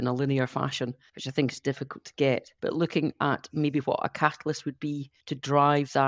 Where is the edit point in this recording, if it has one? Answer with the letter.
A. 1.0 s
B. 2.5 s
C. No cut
B